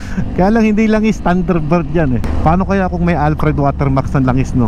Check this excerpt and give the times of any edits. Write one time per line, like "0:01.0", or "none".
0:02.3